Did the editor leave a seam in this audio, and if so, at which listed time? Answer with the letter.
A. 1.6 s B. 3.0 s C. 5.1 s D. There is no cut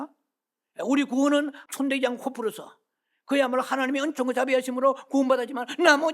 A